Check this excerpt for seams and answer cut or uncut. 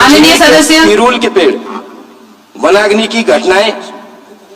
uncut